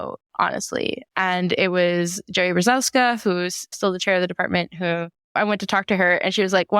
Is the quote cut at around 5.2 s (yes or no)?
yes